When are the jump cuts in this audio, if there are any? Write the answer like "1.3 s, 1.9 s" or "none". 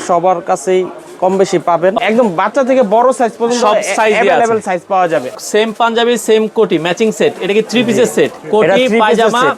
2.0 s, 5.3 s, 8.4 s